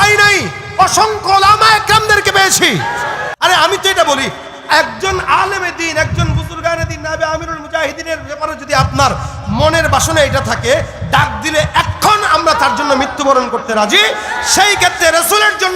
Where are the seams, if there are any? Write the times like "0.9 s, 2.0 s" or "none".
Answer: 3.3 s